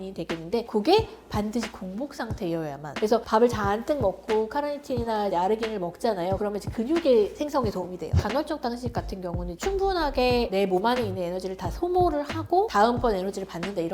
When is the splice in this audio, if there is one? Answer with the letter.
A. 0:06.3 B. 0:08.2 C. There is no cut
B